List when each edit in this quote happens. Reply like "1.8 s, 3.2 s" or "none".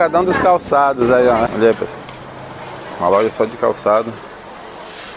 1.5 s